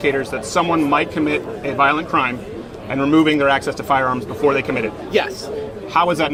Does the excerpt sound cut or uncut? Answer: uncut